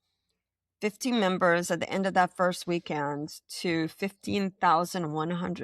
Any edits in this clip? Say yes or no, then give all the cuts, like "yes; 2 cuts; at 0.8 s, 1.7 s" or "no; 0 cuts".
no; 0 cuts